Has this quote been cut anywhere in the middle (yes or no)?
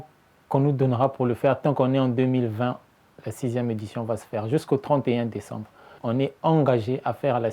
yes